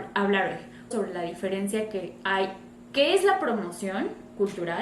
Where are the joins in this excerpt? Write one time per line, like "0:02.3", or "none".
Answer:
0:00.9